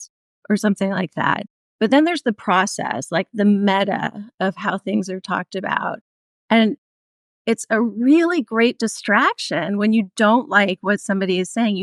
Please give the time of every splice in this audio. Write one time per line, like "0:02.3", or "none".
none